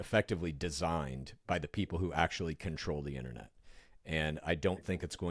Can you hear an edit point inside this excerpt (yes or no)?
no